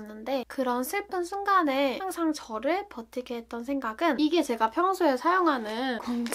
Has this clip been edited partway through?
yes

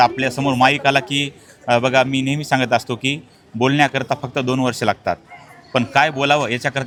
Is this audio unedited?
yes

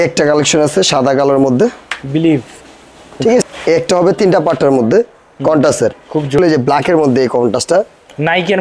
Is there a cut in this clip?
yes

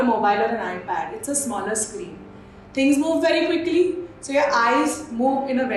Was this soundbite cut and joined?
no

